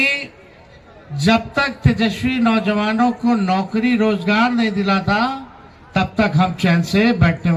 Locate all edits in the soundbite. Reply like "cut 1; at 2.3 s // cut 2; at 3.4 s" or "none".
none